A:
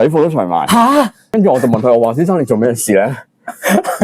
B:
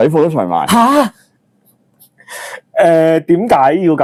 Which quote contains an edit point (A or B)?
A